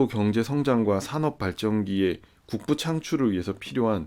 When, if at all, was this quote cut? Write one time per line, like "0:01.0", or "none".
none